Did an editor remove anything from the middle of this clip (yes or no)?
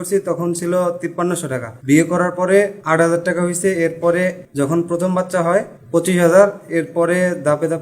yes